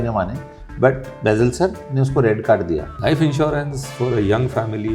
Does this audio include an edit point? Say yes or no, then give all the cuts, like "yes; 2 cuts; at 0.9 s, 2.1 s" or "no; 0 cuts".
yes; 1 cut; at 2.9 s